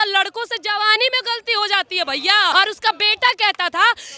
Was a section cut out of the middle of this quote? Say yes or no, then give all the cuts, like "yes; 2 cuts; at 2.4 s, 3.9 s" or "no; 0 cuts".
yes; 1 cut; at 2.5 s